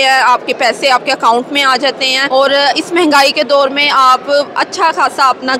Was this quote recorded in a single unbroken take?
no; 1 cut; at 2.2 s

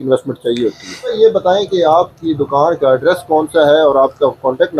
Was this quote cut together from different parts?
yes; 1 cut; at 1.1 s

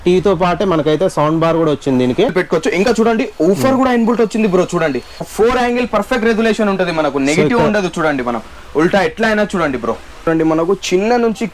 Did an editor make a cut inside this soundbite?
yes; 3 cuts; at 2.3 s, 5.3 s, 10.3 s

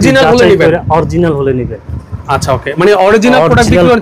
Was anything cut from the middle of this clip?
no; 0 cuts

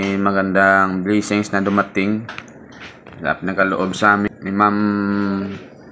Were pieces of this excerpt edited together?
yes; 1 cut; at 4.3 s

